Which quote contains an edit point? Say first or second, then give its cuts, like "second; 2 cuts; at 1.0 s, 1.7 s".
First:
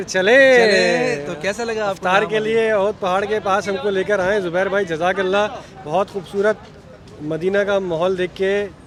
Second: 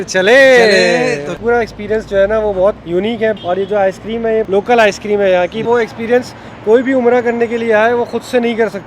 second; 4 cuts; at 1.4 s, 3.1 s, 4.5 s, 5.7 s